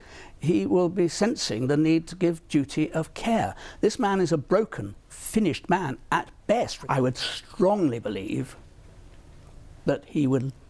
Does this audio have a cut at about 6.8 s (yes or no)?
yes